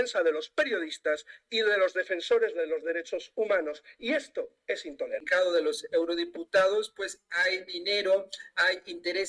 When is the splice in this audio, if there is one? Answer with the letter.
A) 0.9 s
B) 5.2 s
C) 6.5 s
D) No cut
B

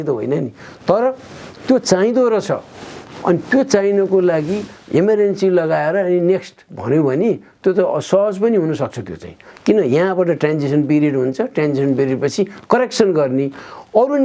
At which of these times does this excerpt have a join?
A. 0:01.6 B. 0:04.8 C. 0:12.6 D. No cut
D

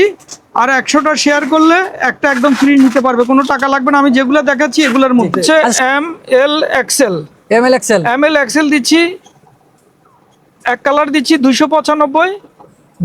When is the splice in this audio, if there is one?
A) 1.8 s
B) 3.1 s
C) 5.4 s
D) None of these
C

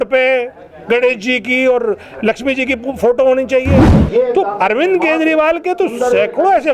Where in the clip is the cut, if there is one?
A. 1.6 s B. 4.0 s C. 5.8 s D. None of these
B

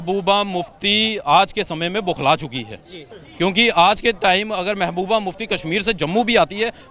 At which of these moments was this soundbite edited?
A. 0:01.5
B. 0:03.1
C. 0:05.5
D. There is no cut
B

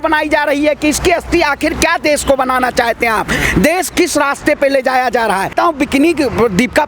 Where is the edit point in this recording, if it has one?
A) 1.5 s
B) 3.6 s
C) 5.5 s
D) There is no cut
C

